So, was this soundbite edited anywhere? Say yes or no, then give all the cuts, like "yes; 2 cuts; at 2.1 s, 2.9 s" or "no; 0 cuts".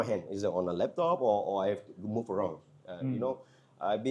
no; 0 cuts